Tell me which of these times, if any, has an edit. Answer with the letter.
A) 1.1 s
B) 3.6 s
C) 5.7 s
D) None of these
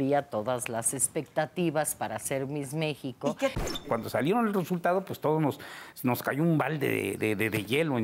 B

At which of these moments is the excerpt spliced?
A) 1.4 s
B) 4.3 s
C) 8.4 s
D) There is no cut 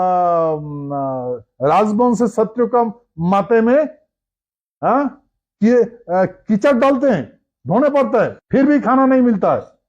C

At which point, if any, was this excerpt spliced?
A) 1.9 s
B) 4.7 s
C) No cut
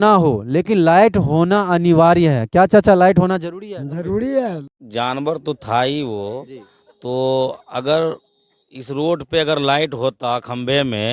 B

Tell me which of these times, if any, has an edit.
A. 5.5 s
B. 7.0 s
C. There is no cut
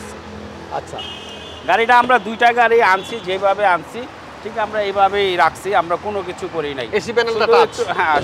C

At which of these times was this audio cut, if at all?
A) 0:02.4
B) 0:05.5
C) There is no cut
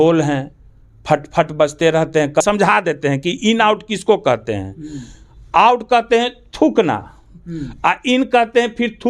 A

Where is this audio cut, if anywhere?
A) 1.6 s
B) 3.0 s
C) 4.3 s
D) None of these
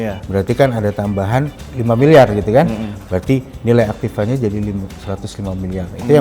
A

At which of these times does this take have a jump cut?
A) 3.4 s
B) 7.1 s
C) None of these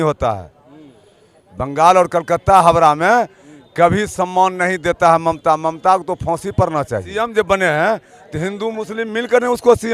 B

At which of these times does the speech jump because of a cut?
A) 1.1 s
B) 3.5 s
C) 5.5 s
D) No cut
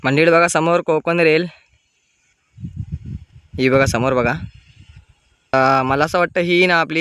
C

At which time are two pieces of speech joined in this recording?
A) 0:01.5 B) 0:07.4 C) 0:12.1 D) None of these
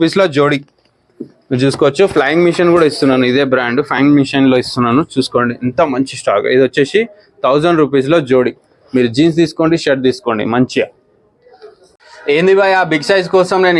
C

